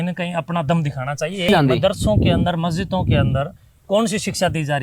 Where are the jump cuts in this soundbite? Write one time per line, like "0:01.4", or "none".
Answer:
0:01.5